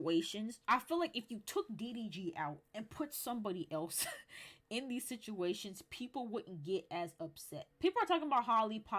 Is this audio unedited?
no; 1 cut; at 7.7 s

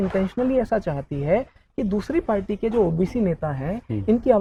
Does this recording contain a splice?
no; 0 cuts

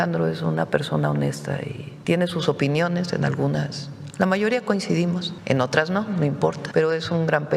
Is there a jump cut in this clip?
yes; 3 cuts; at 1.9 s, 5.3 s, 6.6 s

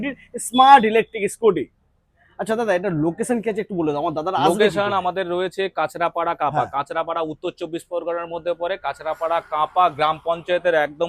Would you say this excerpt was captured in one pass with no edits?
yes; 0 cuts

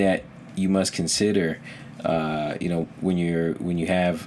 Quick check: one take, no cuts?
yes; 0 cuts

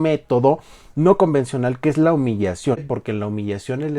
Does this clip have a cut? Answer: yes; 1 cut; at 2.8 s

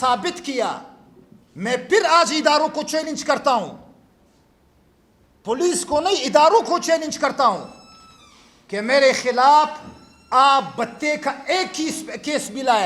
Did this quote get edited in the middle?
no; 0 cuts

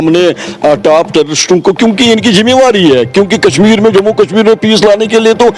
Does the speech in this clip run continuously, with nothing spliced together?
yes; 0 cuts

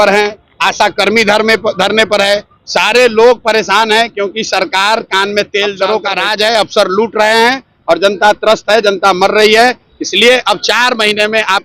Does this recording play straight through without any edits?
no; 1 cut; at 5.8 s

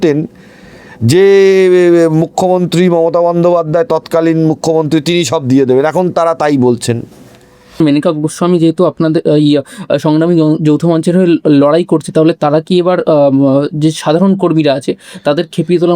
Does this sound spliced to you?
yes; 1 cut; at 7.8 s

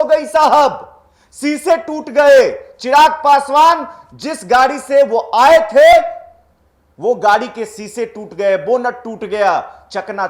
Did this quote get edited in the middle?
no; 0 cuts

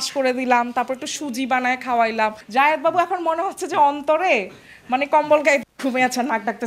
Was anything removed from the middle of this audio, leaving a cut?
yes; 1 cut; at 2.4 s

